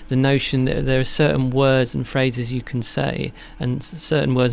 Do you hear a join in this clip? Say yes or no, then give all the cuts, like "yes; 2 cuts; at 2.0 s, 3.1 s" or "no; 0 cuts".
no; 0 cuts